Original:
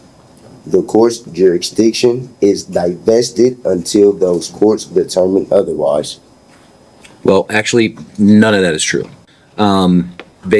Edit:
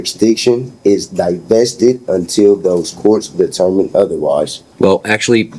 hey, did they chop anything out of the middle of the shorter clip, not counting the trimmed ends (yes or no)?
yes